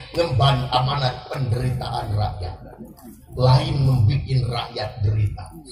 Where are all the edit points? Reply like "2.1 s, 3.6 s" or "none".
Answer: none